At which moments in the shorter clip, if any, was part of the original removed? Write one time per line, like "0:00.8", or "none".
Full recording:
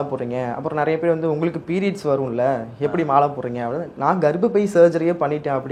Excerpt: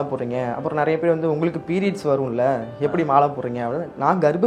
none